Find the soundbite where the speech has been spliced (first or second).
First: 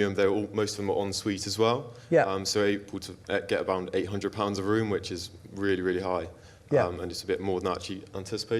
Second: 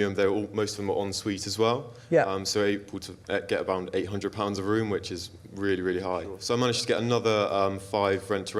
second